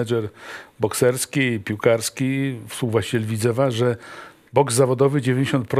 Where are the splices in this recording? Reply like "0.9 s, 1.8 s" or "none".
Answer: none

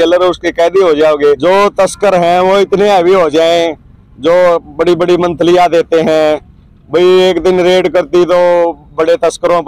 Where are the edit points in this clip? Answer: 1.4 s

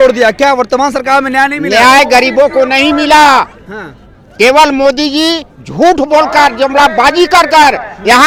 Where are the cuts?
none

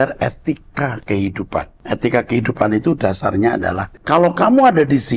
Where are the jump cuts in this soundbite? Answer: 1.8 s, 3.9 s

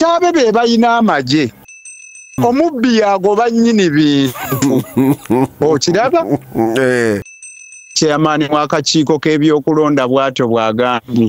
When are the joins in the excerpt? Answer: 1.8 s, 7.3 s

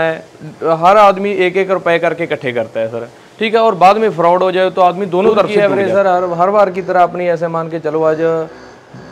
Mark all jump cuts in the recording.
5.5 s

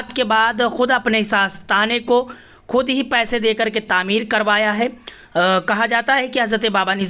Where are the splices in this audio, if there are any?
none

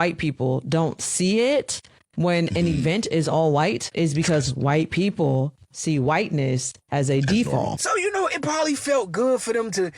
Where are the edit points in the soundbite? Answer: 7.8 s

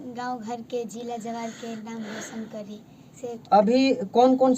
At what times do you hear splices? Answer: 3.2 s

